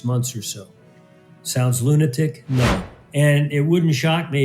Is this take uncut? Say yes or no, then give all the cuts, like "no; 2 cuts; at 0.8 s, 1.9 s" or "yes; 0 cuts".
no; 1 cut; at 3.0 s